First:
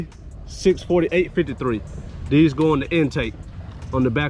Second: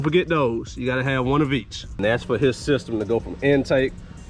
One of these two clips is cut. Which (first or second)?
second